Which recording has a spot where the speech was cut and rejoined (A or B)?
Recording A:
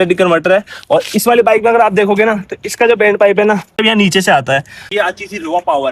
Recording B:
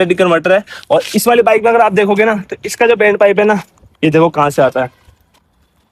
A